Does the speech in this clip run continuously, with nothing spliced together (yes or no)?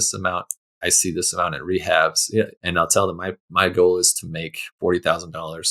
no